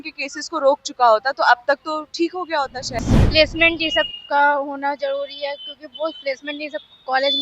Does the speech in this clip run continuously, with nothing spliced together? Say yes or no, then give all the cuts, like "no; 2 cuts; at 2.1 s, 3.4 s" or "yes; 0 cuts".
no; 1 cut; at 3.0 s